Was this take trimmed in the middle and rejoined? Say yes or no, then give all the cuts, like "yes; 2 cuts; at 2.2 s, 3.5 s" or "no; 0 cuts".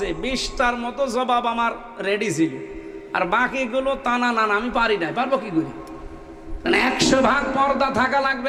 no; 0 cuts